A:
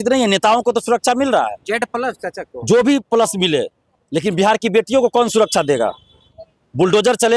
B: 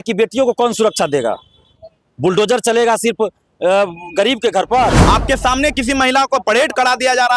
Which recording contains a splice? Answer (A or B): B